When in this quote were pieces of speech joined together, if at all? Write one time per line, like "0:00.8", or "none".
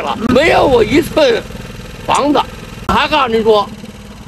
0:02.8